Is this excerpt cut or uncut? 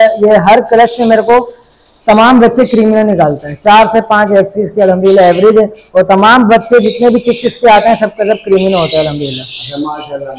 uncut